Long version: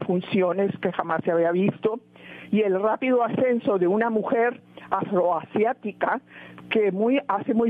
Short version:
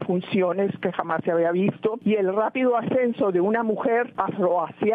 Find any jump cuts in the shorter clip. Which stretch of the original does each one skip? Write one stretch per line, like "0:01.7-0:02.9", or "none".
0:02.0-0:02.4
0:04.6-0:04.9